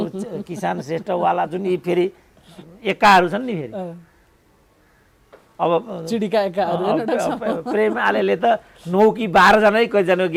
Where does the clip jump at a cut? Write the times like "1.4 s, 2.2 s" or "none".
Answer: none